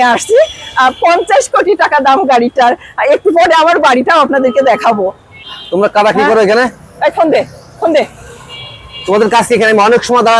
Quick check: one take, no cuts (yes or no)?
no